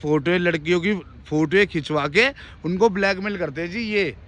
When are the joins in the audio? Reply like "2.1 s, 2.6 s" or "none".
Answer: none